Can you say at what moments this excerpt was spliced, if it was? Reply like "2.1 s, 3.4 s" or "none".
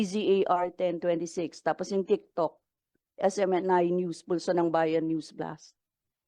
none